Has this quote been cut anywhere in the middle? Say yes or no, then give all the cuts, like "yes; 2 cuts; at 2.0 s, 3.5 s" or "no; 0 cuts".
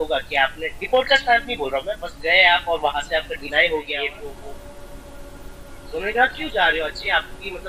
yes; 1 cut; at 3.9 s